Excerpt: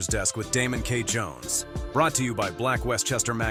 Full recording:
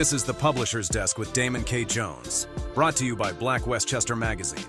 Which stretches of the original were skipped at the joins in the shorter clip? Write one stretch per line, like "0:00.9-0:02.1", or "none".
none